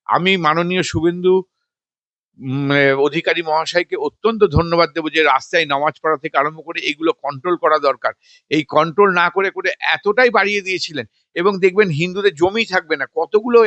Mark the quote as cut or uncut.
uncut